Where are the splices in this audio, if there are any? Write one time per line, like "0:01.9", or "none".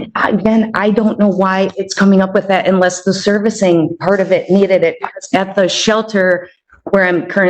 none